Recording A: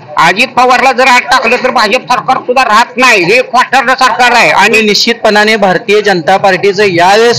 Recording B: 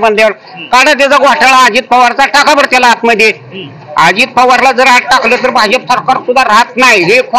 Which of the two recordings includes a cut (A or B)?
A